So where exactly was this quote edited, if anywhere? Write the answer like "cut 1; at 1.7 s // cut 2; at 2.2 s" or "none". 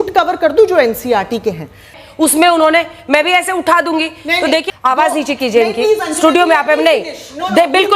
cut 1; at 2.0 s // cut 2; at 4.6 s